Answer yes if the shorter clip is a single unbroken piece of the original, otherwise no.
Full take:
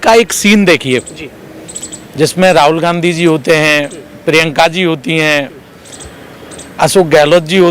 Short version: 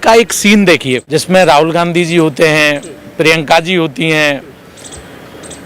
no